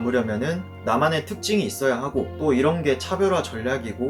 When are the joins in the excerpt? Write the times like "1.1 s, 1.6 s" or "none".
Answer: none